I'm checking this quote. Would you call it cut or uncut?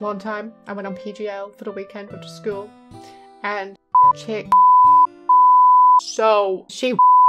cut